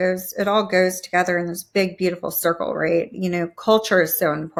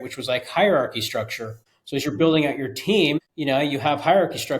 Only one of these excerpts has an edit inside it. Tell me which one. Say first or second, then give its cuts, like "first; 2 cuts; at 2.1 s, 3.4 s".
second; 2 cuts; at 1.9 s, 3.3 s